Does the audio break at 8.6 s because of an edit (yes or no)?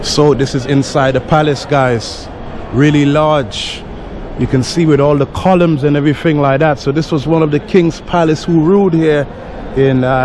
no